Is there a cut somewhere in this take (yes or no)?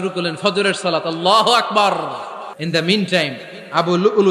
yes